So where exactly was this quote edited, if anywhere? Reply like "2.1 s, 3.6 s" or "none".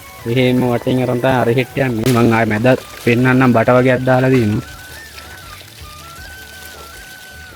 none